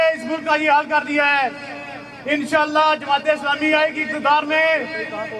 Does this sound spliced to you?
no; 0 cuts

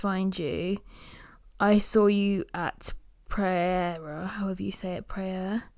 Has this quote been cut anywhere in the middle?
no; 0 cuts

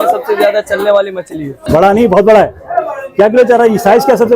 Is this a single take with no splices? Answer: no; 1 cut; at 1.6 s

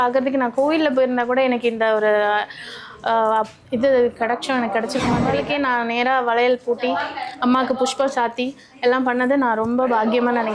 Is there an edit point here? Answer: yes; 1 cut; at 5.3 s

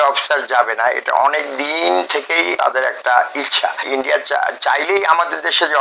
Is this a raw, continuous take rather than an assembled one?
no; 2 cuts; at 2.5 s, 3.9 s

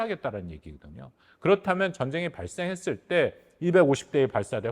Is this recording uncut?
yes; 0 cuts

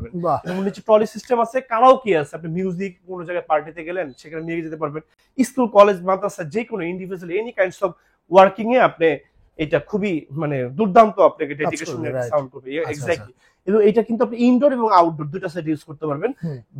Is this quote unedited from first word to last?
yes; 0 cuts

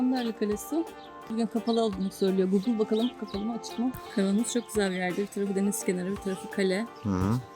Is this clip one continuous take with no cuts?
no; 2 cuts; at 1.3 s, 4.0 s

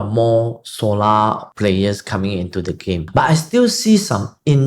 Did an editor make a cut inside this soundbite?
yes; 2 cuts; at 1.5 s, 3.1 s

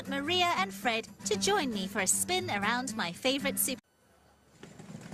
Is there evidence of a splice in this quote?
no; 0 cuts

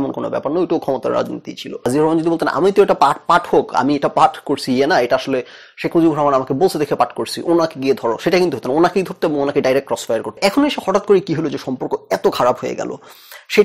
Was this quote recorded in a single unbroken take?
no; 2 cuts; at 1.8 s, 10.4 s

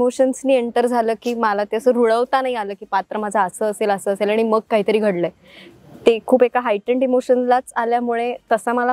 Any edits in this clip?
no; 0 cuts

